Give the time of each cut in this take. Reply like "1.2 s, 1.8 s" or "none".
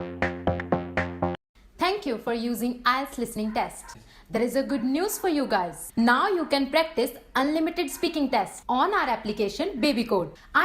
1.4 s

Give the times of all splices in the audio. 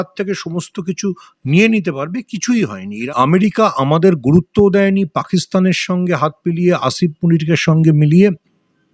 3.0 s

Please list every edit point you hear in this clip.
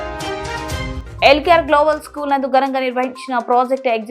1.0 s

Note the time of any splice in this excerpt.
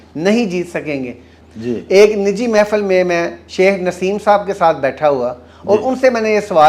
1.3 s

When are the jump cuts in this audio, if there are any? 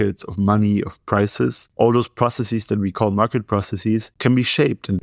1.6 s, 4.1 s

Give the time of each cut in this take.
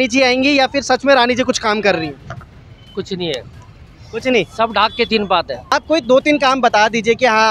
5.7 s

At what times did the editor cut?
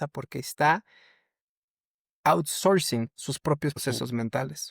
3.8 s

